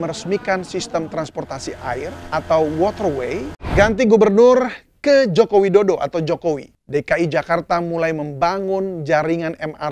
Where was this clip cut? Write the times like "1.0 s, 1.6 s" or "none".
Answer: 2.2 s, 3.7 s, 6.7 s